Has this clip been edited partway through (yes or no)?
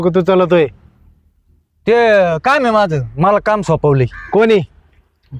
no